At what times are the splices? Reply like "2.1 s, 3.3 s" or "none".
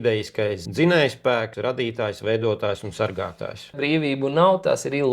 1.5 s, 3.8 s